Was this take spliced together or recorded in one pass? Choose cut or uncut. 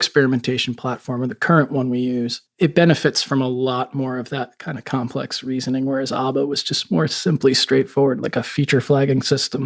cut